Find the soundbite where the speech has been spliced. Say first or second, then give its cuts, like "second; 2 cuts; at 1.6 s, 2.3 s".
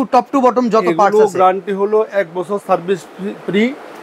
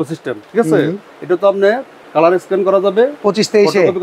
second; 1 cut; at 1.1 s